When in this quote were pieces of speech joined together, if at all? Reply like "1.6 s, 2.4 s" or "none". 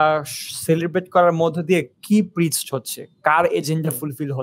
none